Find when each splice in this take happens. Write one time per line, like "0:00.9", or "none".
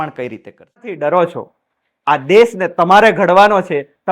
0:00.9

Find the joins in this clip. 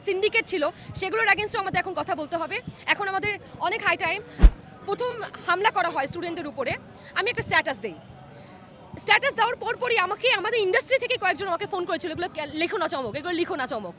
0:04.4

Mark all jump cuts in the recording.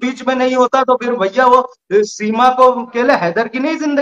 0:02.9

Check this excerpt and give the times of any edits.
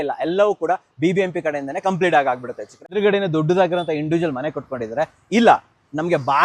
0:02.9

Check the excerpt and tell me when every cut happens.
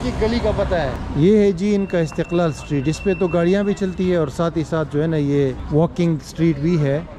0:01.0
0:05.6

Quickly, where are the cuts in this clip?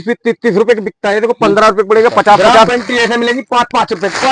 0:02.7

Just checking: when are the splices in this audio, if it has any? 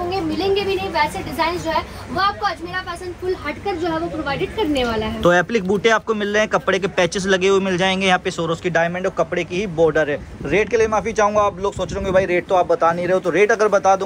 none

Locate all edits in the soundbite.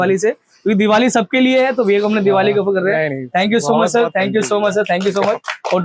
none

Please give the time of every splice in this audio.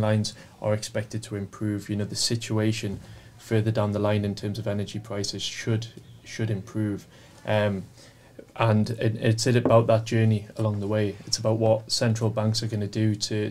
none

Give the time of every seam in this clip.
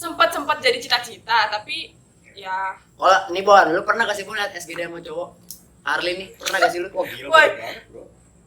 0:02.8

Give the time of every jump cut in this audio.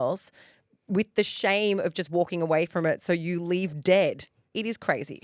none

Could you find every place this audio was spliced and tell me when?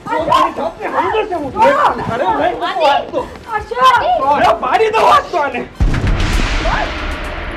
0:05.7

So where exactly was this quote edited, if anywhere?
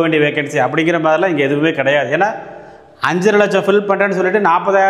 none

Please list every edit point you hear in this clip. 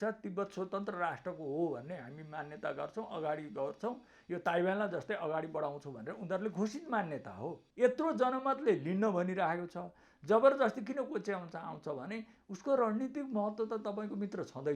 0:07.6

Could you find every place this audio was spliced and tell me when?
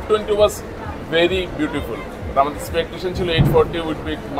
none

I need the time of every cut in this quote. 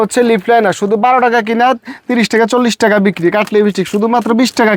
none

